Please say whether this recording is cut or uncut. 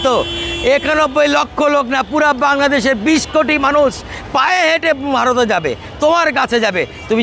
uncut